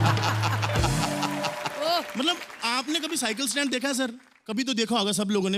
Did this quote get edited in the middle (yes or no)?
no